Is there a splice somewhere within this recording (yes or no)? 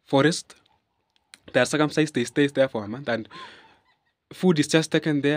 no